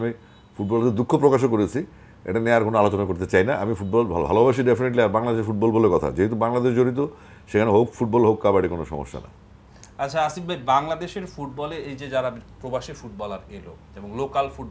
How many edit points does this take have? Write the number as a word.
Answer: zero